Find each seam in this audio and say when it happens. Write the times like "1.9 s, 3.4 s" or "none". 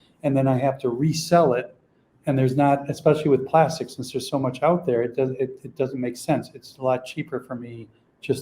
none